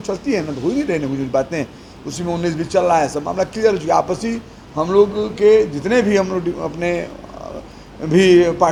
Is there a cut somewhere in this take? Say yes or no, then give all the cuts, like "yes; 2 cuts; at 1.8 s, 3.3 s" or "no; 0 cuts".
no; 0 cuts